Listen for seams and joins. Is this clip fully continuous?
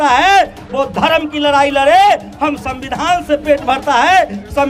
yes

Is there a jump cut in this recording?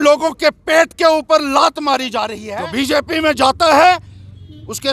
yes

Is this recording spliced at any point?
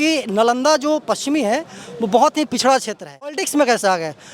yes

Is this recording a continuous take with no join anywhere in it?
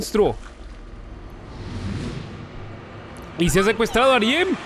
yes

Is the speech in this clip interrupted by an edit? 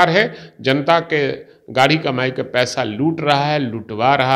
no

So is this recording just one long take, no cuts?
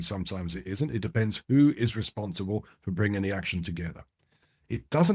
yes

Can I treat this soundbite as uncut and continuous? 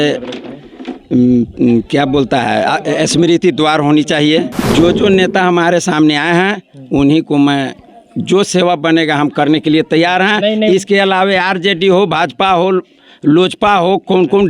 no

